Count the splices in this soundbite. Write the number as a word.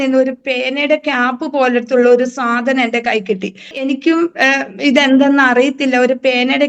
one